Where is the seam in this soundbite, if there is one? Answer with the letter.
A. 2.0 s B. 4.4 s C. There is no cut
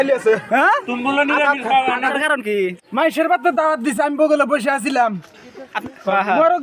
A